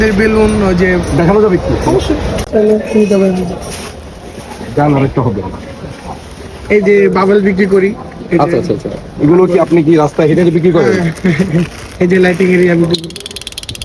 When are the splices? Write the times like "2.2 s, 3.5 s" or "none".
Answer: none